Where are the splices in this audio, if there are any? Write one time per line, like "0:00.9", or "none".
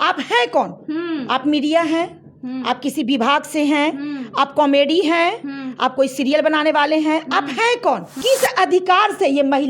0:08.1